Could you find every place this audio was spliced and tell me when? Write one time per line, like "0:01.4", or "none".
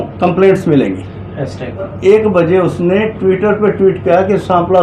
0:01.9